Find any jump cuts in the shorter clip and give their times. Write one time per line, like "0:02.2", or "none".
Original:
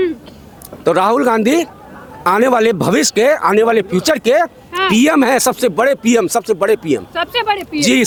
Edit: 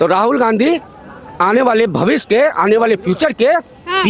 none